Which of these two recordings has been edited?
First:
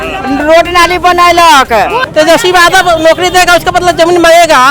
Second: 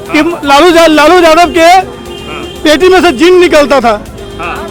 first; 1 cut; at 2.0 s

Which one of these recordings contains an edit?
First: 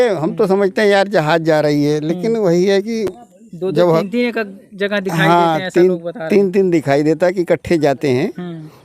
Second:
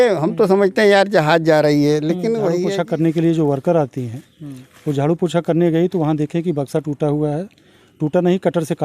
second; 1 cut; at 2.7 s

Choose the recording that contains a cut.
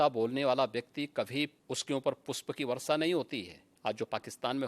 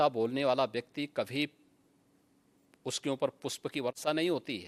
first; 2 cuts; at 1.6 s, 3.6 s

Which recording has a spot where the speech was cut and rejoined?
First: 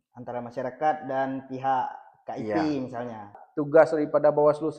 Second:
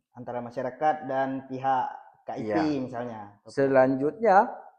first; 1 cut; at 3.4 s

